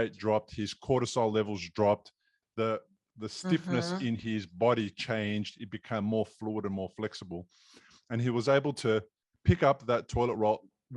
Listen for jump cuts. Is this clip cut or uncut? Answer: cut